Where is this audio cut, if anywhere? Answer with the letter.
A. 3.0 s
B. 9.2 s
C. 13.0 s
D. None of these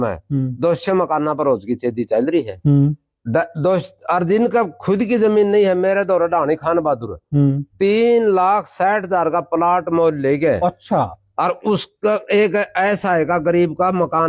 D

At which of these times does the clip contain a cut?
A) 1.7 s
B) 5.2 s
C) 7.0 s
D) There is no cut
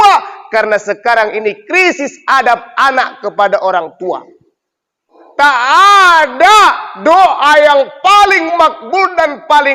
B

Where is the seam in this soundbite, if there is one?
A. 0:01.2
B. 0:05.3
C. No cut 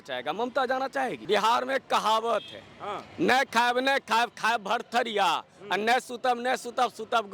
A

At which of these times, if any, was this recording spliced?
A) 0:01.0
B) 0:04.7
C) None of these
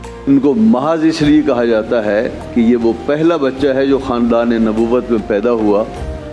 C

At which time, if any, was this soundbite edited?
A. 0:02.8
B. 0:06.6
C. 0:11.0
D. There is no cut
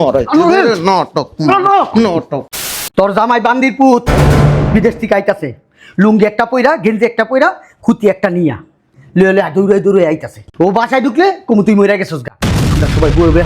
A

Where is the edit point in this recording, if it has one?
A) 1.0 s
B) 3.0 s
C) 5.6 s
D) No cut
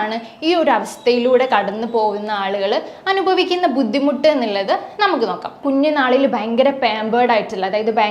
C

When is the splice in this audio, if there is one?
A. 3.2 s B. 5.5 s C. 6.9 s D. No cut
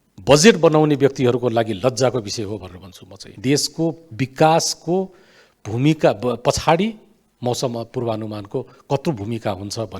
A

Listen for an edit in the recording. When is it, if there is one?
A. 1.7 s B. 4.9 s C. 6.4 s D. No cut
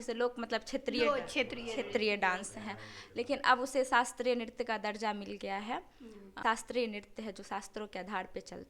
C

